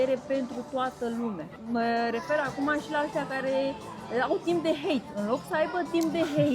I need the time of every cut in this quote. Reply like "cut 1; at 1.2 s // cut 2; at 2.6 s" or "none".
cut 1; at 1.5 s

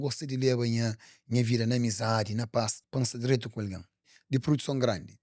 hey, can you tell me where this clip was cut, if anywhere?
cut 1; at 2.8 s // cut 2; at 4.0 s

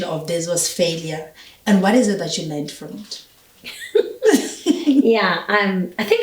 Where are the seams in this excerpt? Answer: none

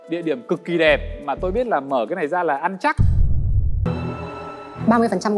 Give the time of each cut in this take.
cut 1; at 3.9 s

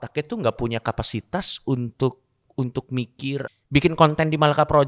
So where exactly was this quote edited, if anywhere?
cut 1; at 3.5 s

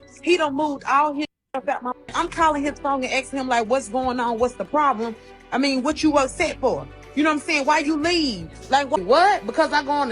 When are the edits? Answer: cut 1; at 2.1 s // cut 2; at 9.0 s

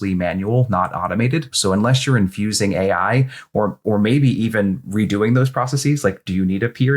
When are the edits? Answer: cut 1; at 1.5 s

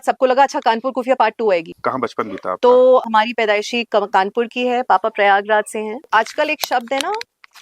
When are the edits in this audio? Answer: cut 1; at 1.7 s // cut 2; at 3.0 s // cut 3; at 6.0 s

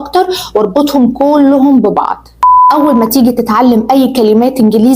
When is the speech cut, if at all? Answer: cut 1; at 2.5 s

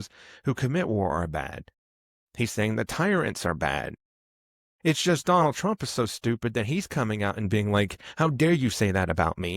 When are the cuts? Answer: none

